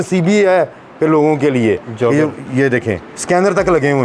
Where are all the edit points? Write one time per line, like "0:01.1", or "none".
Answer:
0:03.1